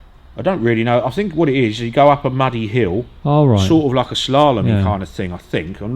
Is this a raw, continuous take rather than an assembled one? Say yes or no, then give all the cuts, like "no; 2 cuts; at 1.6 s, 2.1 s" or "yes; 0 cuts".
no; 1 cut; at 3.2 s